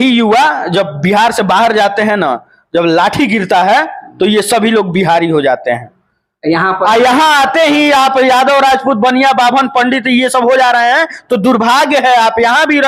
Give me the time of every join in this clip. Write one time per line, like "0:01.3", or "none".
none